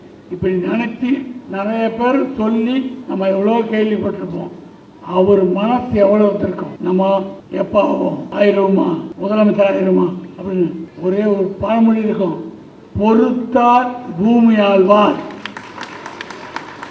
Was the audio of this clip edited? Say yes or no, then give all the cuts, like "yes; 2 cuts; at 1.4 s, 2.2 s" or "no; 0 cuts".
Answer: yes; 5 cuts; at 6.7 s, 7.4 s, 8.2 s, 9.1 s, 10.9 s